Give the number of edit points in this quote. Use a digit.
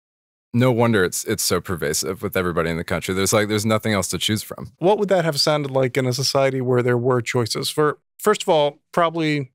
1